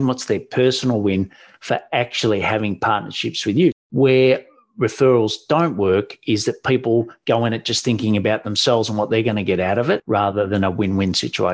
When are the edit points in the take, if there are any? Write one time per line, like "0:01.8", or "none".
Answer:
0:03.8
0:10.0